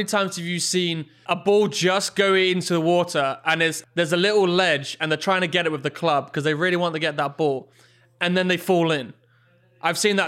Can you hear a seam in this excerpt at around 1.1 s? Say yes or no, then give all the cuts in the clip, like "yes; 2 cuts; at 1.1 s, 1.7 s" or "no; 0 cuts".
yes; 2 cuts; at 1.1 s, 3.8 s